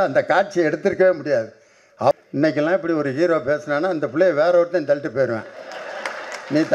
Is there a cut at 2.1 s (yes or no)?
yes